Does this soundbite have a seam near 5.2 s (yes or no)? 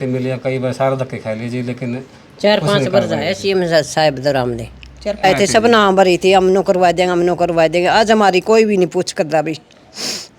yes